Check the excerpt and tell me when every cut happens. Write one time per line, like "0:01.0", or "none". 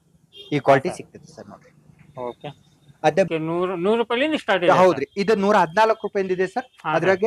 0:03.3